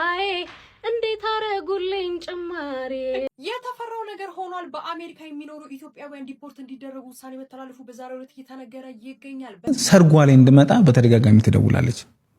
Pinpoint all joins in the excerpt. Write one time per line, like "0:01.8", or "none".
0:03.5
0:09.7